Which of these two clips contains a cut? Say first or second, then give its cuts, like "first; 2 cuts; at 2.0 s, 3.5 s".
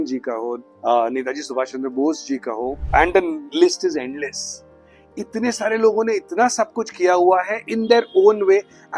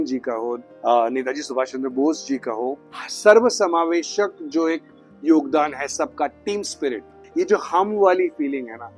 second; 2 cuts; at 2.8 s, 7.1 s